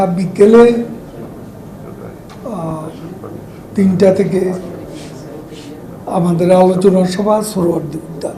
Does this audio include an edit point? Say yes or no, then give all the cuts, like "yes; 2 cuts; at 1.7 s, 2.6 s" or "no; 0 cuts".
no; 0 cuts